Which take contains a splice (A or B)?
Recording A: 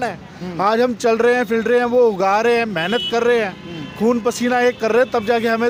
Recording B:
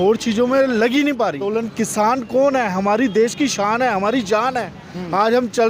B